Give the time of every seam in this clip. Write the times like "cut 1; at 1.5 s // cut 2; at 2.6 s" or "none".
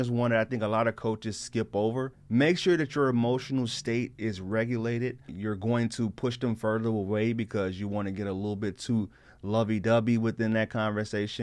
cut 1; at 2.2 s // cut 2; at 5.3 s